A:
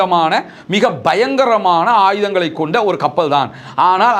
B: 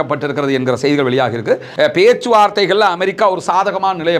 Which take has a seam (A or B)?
B